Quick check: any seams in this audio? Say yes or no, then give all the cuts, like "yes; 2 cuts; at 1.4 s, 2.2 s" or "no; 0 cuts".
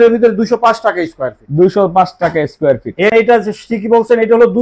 yes; 1 cut; at 3.1 s